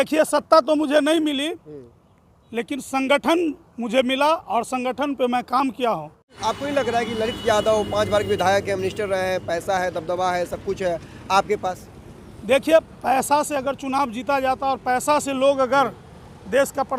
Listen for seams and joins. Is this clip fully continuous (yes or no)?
no